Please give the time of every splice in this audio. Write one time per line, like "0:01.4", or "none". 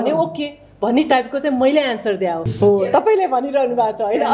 0:02.5